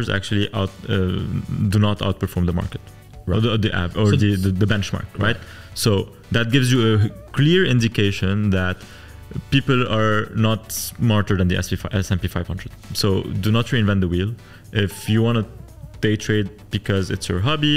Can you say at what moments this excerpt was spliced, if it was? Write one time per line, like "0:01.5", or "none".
none